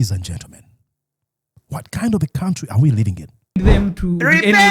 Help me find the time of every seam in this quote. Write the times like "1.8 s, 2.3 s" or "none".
3.6 s

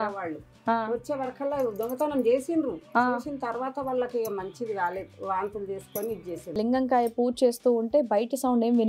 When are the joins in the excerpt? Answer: 6.6 s

